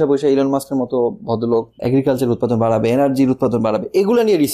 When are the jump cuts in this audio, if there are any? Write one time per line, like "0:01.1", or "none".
0:01.8